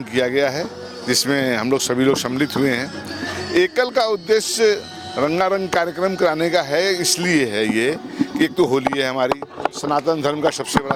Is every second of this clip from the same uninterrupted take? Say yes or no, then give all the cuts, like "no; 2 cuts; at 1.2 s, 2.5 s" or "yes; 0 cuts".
yes; 0 cuts